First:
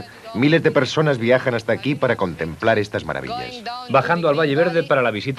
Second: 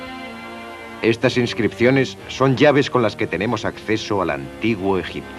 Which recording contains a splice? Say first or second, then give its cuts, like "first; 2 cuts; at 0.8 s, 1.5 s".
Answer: second; 1 cut; at 2.7 s